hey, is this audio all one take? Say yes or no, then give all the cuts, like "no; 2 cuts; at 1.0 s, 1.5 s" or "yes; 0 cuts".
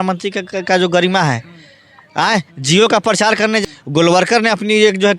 no; 1 cut; at 3.6 s